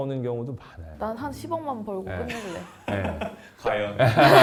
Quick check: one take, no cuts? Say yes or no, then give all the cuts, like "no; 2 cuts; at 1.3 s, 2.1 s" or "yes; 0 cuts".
yes; 0 cuts